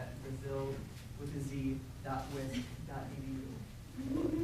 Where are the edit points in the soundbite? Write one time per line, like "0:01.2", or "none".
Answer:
0:02.6